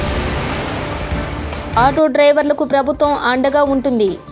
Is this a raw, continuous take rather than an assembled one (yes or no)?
no